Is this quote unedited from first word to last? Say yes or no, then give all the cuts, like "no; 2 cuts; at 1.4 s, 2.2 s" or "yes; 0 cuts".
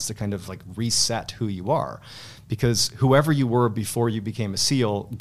yes; 0 cuts